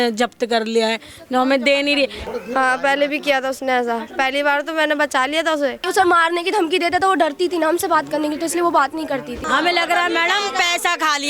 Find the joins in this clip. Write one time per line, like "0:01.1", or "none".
0:02.2
0:05.8
0:09.4